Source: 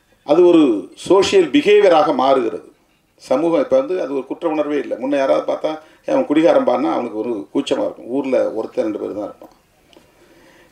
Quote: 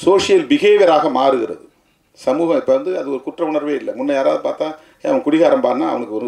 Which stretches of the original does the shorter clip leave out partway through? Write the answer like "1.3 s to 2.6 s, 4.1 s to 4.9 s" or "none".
none